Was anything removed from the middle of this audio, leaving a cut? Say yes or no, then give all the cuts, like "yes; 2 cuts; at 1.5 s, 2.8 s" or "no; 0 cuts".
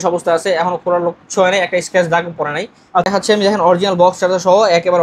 yes; 1 cut; at 3.1 s